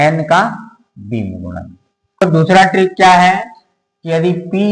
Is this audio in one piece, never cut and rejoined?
no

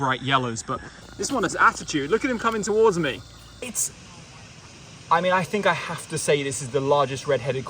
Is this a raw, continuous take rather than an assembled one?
no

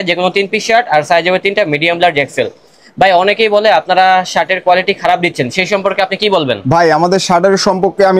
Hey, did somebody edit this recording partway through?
no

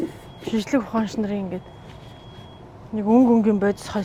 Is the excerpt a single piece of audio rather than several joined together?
yes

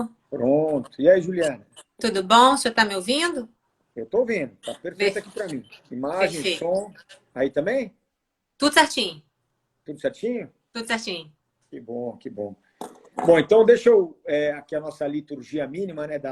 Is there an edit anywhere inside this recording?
yes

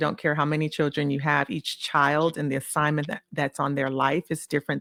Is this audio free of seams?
yes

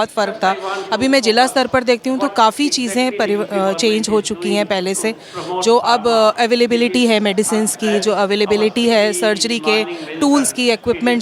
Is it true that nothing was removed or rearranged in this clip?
yes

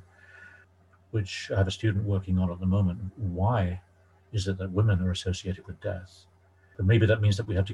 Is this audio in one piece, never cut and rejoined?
no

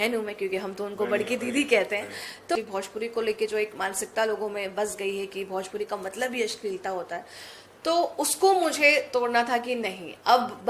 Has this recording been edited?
yes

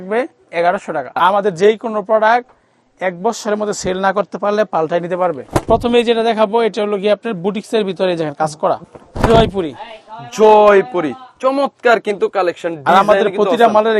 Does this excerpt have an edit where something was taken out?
yes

